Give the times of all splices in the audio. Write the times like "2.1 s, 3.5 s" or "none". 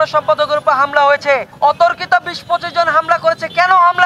1.5 s